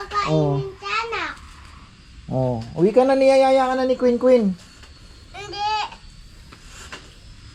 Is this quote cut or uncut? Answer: uncut